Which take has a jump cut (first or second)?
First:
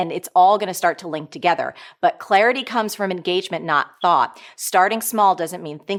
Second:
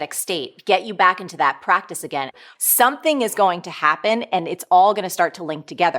second